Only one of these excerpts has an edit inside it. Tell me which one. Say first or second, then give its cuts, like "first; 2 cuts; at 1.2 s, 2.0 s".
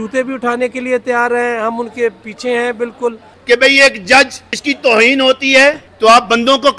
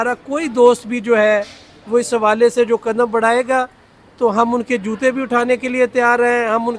first; 3 cuts; at 3.3 s, 4.5 s, 5.9 s